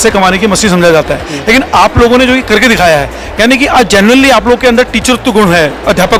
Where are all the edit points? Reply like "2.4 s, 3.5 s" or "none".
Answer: none